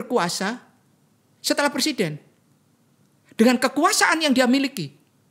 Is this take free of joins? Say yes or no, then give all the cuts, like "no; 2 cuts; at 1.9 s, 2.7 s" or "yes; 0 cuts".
yes; 0 cuts